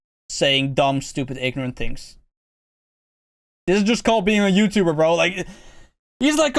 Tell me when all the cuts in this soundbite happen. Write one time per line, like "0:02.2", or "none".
none